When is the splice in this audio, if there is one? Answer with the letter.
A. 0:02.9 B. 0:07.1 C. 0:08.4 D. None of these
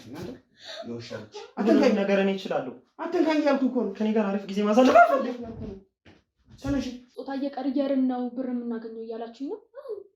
B